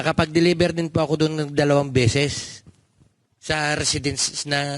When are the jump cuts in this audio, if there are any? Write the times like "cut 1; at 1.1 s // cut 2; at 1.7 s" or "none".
none